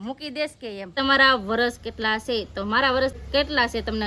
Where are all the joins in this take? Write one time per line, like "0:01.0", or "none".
0:00.9
0:03.2